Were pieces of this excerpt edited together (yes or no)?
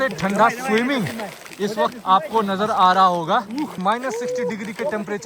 yes